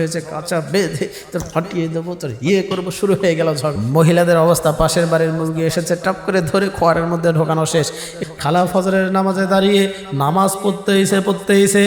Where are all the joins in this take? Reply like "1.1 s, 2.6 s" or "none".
3.7 s, 8.2 s